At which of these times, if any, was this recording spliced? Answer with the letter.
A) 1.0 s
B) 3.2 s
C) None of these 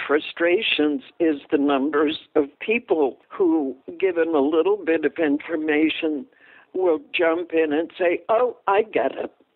B